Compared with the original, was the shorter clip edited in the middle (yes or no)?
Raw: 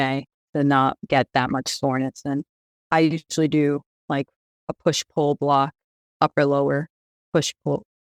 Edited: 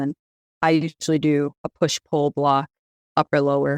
yes